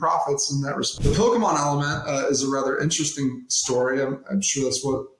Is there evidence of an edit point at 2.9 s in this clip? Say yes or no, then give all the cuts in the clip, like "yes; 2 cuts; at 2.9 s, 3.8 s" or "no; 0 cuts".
no; 1 cut; at 0.9 s